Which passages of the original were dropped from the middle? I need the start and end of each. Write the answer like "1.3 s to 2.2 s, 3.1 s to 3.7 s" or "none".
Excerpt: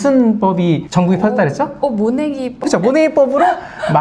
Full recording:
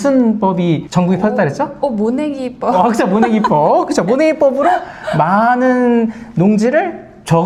2.6 s to 3.9 s